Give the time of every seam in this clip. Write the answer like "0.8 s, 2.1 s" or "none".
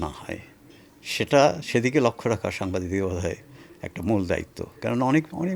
none